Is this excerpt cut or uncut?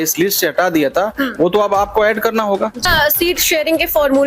cut